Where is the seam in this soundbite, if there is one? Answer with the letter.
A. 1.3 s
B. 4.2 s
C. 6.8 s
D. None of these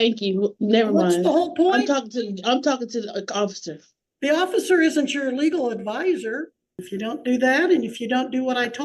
C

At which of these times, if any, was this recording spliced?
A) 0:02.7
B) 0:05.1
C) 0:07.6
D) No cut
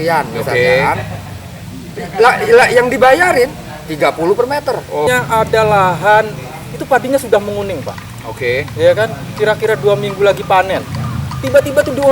B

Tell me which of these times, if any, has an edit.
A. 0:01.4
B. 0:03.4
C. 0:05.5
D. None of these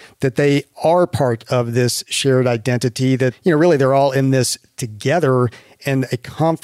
B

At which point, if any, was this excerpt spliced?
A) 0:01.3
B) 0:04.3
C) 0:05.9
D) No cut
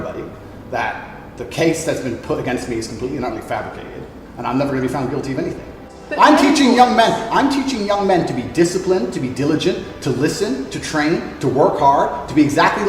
C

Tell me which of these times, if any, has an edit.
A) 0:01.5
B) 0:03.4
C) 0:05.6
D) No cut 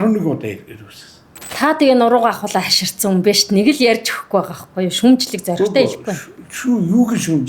A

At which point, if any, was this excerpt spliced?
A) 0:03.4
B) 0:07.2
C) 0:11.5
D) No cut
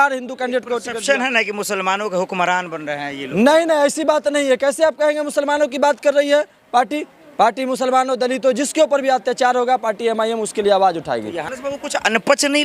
C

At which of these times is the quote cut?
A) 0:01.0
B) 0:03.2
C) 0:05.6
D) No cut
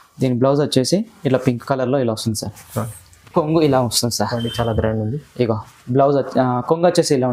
B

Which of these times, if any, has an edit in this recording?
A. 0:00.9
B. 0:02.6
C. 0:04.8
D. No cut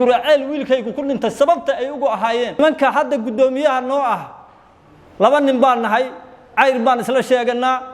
B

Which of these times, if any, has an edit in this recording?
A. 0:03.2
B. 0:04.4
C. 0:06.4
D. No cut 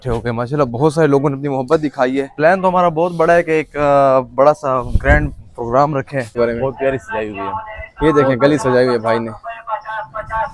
C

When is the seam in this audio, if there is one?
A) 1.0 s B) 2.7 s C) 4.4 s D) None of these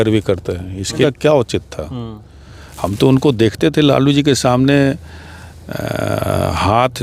A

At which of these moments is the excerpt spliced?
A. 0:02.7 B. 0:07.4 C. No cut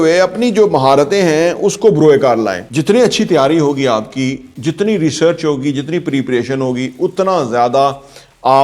A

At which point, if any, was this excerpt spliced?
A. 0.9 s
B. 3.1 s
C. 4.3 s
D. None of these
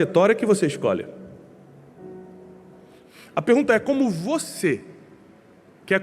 B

